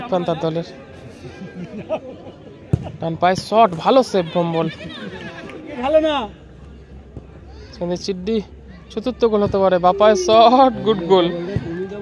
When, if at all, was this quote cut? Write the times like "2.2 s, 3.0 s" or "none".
5.7 s